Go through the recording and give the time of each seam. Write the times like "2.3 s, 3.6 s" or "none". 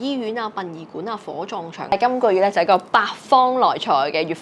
1.9 s